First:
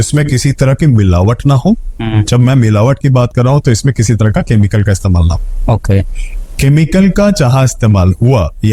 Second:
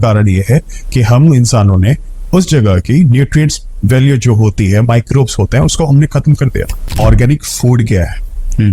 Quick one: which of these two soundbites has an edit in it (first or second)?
second